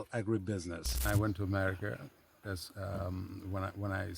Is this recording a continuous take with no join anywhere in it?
no; 1 cut; at 0.9 s

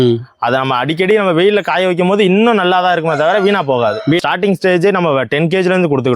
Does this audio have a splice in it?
yes; 1 cut; at 4.2 s

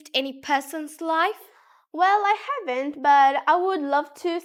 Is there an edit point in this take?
no; 0 cuts

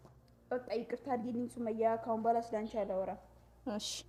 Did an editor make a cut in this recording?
no; 0 cuts

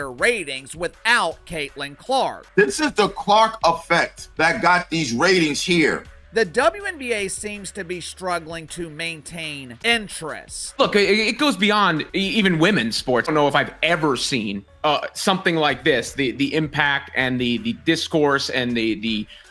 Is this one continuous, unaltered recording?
no; 6 cuts; at 2.4 s, 6.1 s, 9.7 s, 10.6 s, 12.1 s, 13.3 s

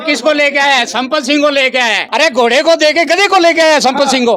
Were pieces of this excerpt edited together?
yes; 1 cut; at 2.0 s

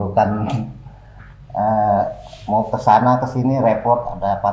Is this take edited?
no; 0 cuts

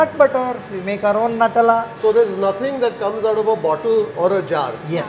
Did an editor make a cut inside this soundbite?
yes; 1 cut; at 1.9 s

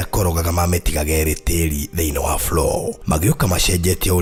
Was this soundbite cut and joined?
no; 0 cuts

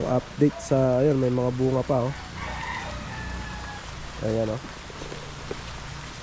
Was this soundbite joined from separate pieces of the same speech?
no; 0 cuts

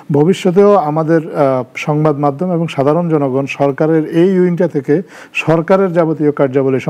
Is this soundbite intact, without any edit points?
yes; 0 cuts

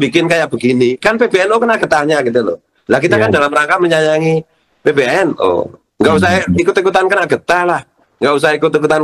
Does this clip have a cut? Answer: no; 0 cuts

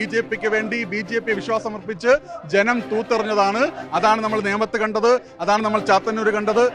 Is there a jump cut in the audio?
no; 0 cuts

